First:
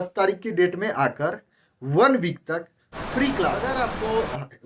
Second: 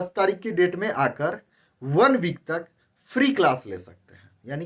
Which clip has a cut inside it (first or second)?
first